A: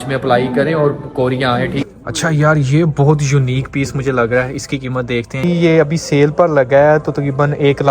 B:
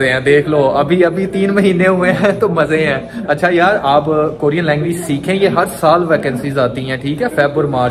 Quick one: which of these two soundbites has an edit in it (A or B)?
A